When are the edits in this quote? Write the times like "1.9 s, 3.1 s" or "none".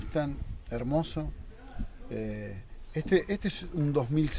none